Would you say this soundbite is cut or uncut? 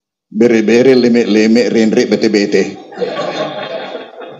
uncut